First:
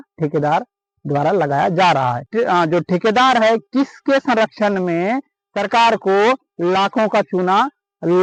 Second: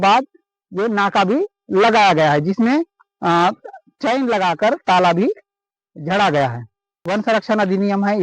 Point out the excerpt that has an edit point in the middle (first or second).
second